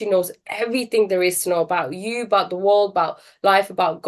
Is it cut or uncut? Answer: uncut